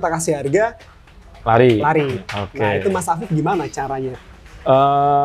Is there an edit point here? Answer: no; 0 cuts

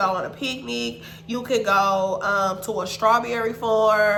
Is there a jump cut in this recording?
no; 0 cuts

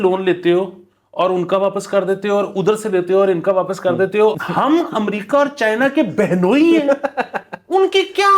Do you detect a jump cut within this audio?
yes; 1 cut; at 4.3 s

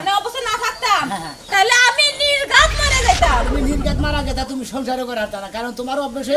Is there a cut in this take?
no; 0 cuts

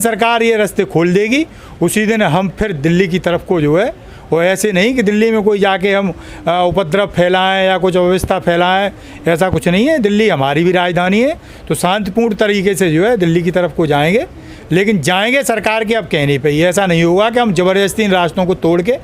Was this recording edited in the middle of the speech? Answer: no; 0 cuts

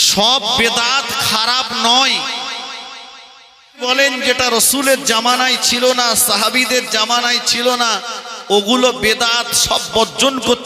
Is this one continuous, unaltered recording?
no; 1 cut; at 3.8 s

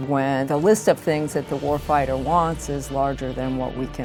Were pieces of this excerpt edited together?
no; 0 cuts

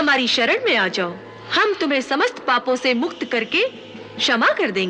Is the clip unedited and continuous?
yes; 0 cuts

